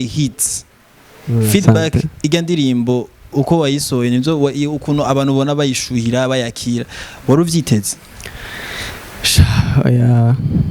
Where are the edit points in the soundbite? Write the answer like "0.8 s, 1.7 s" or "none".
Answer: none